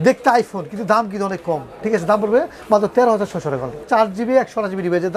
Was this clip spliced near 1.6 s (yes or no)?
no